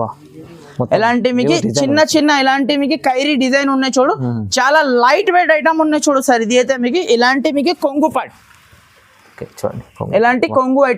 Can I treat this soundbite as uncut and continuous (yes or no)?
yes